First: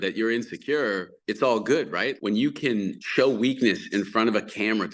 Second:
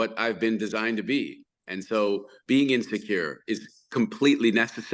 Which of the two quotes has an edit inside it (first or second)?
first